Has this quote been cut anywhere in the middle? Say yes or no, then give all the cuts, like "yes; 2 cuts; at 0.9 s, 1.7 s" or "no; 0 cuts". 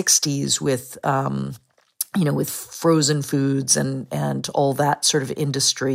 no; 0 cuts